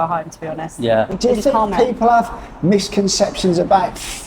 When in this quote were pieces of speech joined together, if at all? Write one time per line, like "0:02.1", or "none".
0:01.1